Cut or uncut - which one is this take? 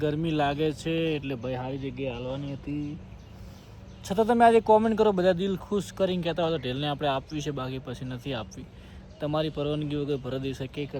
uncut